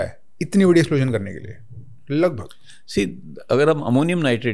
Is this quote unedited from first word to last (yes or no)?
yes